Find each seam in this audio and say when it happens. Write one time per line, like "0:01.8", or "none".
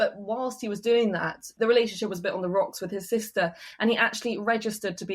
0:01.4

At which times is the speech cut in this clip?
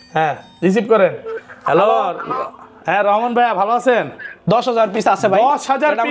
0:04.4

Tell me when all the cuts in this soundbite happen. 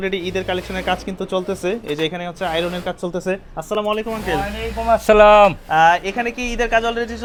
none

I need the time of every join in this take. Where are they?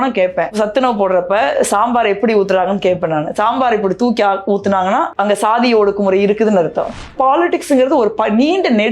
0:05.1
0:07.0

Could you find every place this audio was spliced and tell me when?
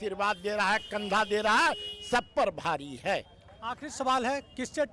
none

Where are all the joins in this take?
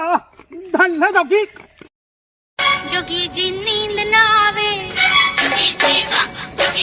none

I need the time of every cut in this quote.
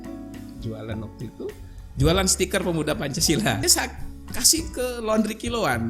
0:03.6

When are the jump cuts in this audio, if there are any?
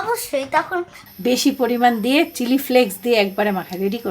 0:01.0

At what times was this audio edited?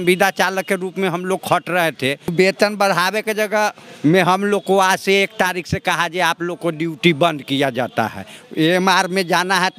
0:02.3

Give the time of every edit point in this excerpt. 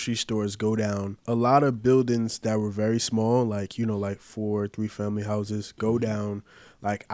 0:01.1

